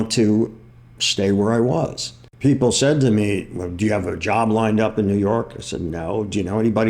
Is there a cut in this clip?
yes; 1 cut; at 2.2 s

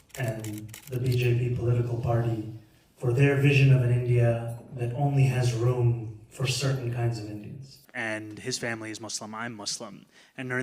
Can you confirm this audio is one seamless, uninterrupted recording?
no; 1 cut; at 7.8 s

